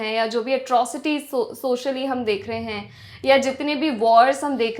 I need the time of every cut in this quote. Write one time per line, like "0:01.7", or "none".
none